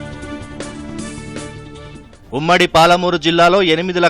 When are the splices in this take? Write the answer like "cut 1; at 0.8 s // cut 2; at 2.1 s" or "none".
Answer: cut 1; at 2.1 s